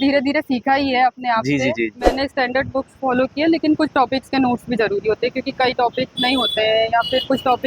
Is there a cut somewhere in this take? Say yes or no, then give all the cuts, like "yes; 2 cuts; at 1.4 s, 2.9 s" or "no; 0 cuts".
yes; 1 cut; at 2.0 s